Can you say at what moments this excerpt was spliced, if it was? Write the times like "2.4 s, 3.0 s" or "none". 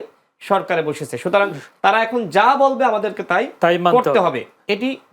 none